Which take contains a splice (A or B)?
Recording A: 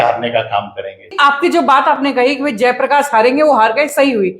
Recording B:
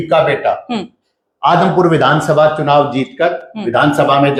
A